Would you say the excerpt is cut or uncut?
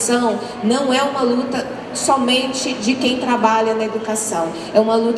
uncut